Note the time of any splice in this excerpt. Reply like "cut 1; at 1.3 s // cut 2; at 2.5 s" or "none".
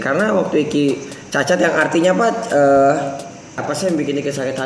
cut 1; at 3.6 s